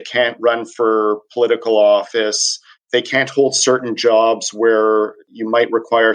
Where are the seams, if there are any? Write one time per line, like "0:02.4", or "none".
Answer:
0:02.8
0:05.3